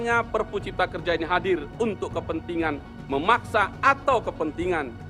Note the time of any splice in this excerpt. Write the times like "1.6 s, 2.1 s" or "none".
none